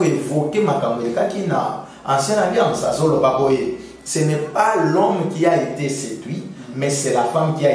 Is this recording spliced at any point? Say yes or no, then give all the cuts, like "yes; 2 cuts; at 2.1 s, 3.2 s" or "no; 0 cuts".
no; 0 cuts